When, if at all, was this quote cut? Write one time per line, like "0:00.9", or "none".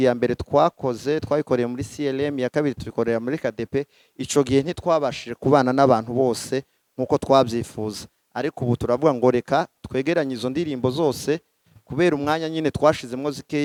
none